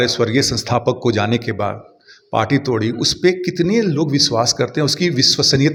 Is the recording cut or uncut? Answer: uncut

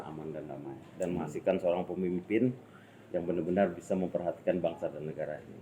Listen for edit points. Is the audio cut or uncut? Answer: uncut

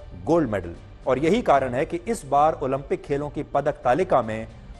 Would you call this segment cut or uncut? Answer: uncut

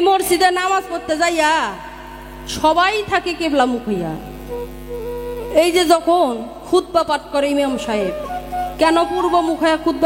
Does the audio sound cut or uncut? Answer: uncut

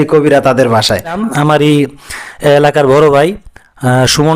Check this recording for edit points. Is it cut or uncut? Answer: cut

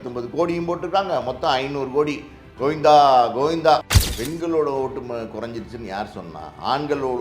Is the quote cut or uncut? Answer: cut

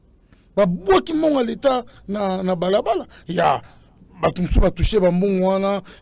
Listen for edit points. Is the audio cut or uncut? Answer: uncut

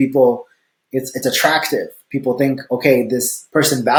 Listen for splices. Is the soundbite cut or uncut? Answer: uncut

